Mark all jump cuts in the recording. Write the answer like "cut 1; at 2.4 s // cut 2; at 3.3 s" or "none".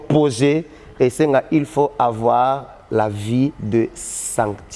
none